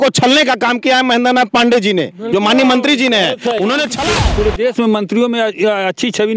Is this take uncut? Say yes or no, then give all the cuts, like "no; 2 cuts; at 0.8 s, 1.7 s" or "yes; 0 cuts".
no; 1 cut; at 4.0 s